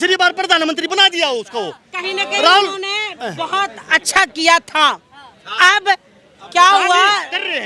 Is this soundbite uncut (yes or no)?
yes